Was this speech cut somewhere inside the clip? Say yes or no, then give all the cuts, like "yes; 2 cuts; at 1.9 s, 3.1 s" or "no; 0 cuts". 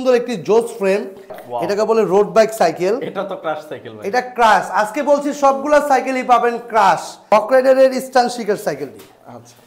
yes; 2 cuts; at 1.4 s, 7.1 s